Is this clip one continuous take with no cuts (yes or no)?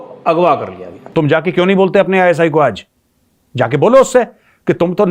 no